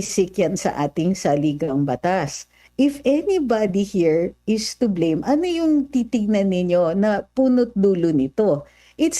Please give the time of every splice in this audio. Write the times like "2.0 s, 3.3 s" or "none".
2.6 s